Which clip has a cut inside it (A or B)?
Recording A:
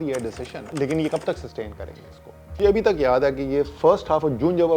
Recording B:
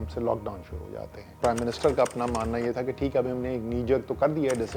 A